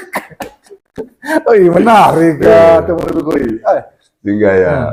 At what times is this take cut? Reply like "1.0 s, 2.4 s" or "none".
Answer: none